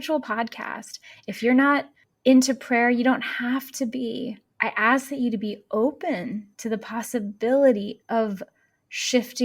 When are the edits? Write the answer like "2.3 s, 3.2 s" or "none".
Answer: 4.5 s